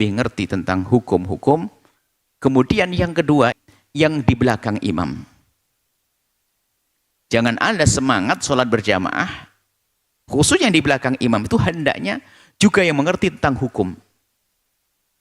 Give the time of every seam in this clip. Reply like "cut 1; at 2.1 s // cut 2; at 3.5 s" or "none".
cut 1; at 3.6 s